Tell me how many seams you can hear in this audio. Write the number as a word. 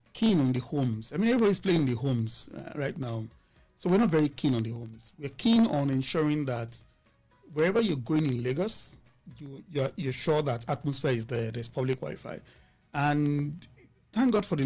zero